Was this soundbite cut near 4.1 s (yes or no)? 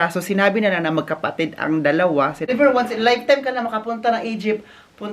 no